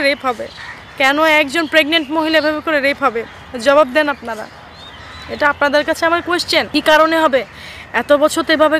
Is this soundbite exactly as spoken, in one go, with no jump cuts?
no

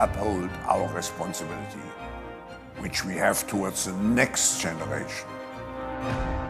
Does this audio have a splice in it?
no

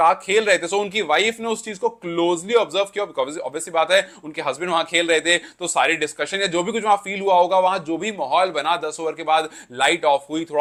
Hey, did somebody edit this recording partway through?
no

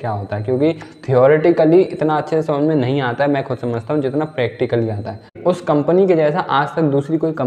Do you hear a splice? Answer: yes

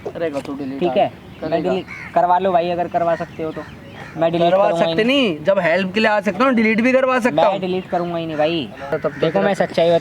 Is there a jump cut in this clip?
yes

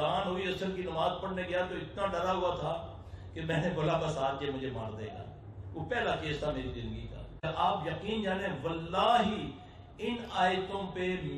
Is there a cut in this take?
yes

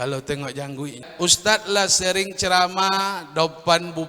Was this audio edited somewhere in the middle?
yes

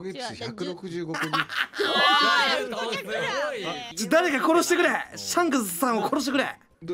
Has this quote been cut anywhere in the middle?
no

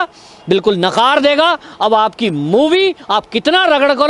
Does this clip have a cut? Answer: no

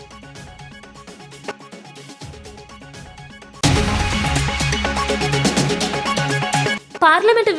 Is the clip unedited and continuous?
yes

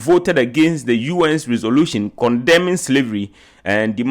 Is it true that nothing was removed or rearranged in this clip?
yes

